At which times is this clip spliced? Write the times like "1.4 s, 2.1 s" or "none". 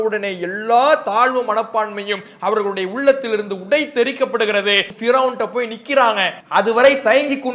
4.9 s, 6.3 s

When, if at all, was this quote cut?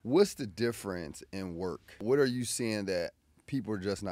2.0 s

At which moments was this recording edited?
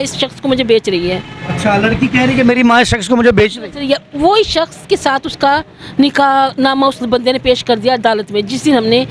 none

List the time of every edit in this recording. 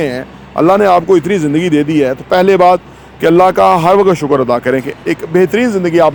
none

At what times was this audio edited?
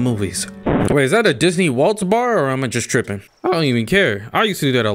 3.3 s

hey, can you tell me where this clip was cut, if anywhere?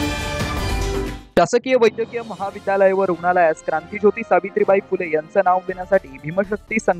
1.1 s

